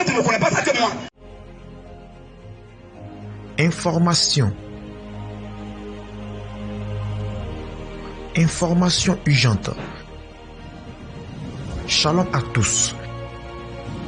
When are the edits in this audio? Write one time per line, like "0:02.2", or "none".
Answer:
0:01.1